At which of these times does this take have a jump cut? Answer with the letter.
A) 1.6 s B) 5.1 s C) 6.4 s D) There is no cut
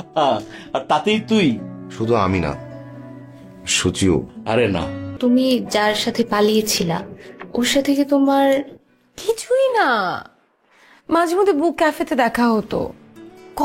B